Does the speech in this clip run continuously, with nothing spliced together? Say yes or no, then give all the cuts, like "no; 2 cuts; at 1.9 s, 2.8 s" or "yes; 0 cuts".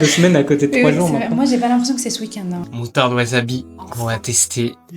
no; 1 cut; at 2.6 s